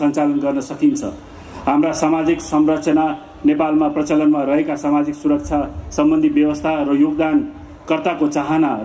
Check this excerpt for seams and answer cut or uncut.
uncut